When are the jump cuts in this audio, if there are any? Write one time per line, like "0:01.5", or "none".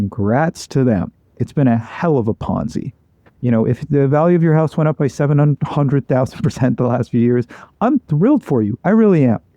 0:01.3